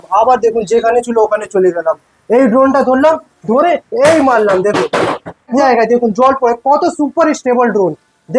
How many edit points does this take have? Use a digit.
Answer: 1